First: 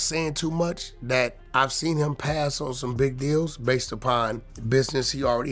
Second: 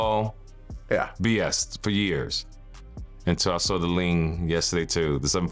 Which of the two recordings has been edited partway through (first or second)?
first